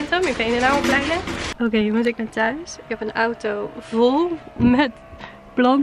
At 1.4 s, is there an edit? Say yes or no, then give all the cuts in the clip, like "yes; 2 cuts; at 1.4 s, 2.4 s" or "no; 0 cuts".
yes; 1 cut; at 1.4 s